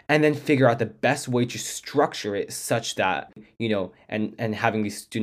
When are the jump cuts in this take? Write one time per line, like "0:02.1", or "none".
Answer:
0:03.3